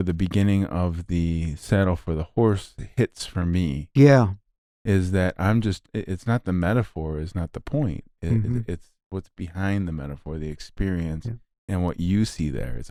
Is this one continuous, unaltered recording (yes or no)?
yes